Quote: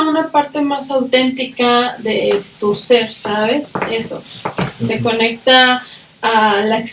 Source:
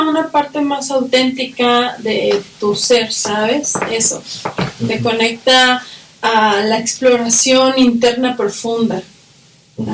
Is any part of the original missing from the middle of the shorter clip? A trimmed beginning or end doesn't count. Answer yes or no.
no